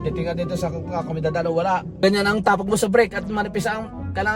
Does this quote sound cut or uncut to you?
cut